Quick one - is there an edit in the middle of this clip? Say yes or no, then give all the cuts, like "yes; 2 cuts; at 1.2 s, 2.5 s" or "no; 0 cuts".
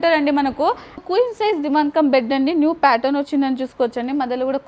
yes; 1 cut; at 1.0 s